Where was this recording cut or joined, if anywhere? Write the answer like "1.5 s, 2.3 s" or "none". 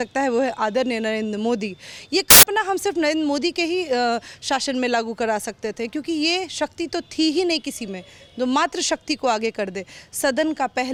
none